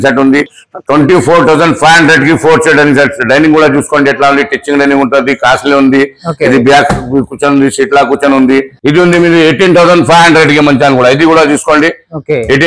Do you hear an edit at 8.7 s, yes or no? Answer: yes